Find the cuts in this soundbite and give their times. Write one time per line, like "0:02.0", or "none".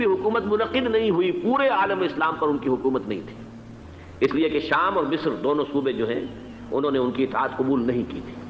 none